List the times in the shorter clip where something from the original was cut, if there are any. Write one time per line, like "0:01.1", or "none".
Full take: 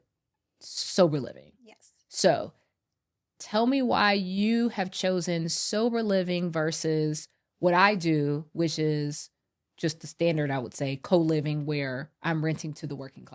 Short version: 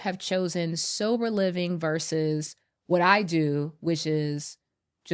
none